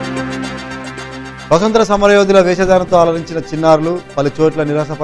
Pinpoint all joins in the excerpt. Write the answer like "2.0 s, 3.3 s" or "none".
1.4 s